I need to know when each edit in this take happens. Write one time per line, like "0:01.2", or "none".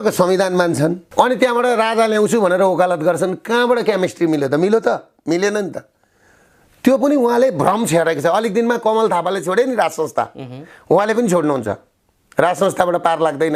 none